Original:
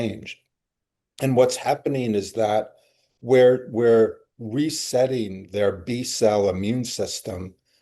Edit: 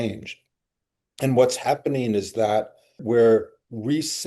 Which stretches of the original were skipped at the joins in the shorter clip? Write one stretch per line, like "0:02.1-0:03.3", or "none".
0:03.0-0:03.7